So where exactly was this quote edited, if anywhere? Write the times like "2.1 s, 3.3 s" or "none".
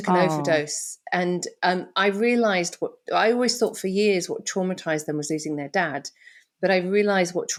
none